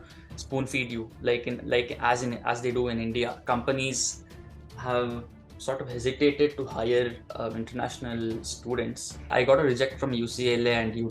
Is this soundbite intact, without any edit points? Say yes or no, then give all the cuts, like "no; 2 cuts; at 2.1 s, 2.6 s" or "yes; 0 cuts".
no; 2 cuts; at 3.4 s, 9.3 s